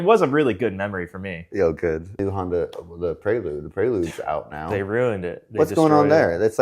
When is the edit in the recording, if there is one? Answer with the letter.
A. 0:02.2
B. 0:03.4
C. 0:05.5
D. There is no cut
A